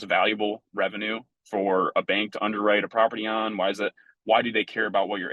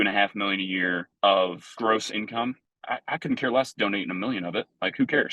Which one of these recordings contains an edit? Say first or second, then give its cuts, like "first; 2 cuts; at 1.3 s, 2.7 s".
second; 3 cuts; at 1.1 s, 1.7 s, 2.7 s